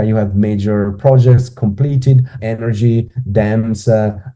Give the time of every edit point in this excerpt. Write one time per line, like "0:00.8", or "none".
0:02.4